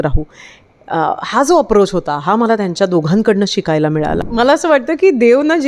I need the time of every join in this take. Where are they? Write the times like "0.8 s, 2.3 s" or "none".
4.2 s